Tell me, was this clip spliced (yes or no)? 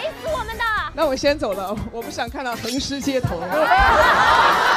yes